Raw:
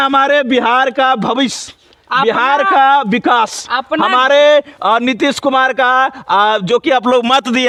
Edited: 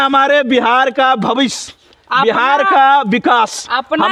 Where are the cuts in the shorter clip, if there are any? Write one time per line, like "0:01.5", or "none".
none